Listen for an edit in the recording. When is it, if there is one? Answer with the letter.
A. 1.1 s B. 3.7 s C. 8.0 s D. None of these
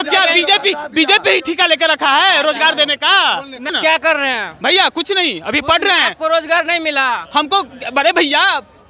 B